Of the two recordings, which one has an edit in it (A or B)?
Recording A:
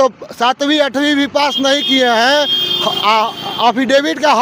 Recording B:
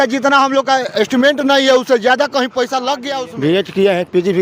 B